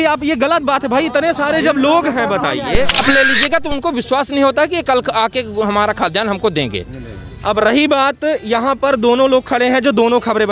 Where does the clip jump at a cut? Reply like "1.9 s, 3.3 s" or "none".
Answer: 3.0 s